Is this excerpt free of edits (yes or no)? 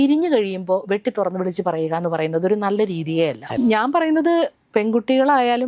no